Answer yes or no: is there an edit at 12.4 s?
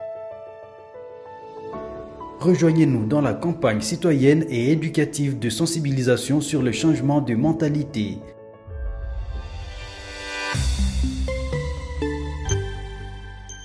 no